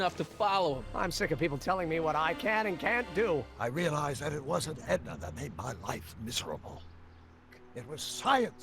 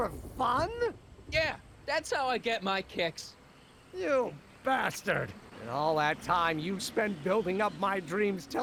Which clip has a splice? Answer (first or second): first